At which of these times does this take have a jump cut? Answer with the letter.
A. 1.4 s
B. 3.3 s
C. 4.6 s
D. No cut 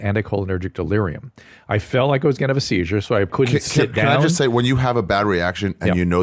B